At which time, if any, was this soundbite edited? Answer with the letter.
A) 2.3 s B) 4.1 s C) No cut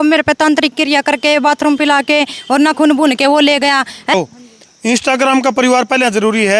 B